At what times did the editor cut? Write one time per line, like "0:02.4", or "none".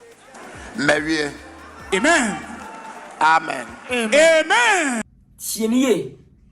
0:05.0